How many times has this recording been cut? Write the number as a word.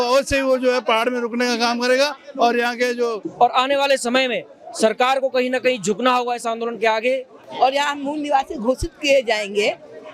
two